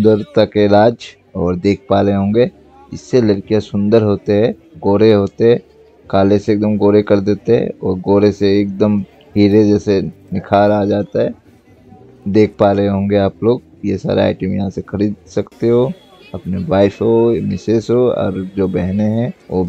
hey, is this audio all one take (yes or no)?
yes